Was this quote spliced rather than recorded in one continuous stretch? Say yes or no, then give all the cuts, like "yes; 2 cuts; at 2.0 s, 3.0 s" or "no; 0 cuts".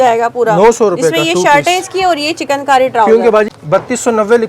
yes; 1 cut; at 3.5 s